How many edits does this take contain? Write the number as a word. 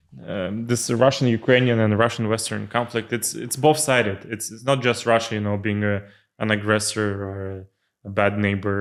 zero